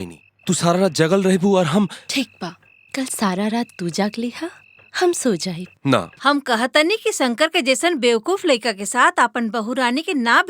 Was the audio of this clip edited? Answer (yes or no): yes